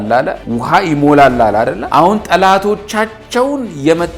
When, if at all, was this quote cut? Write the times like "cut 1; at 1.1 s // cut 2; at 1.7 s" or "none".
cut 1; at 1.8 s